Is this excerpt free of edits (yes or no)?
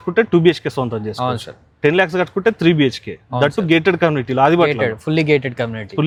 yes